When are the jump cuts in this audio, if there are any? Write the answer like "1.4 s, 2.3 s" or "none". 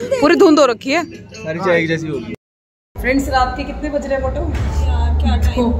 2.3 s